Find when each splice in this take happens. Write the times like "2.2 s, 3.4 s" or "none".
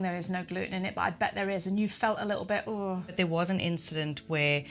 3.1 s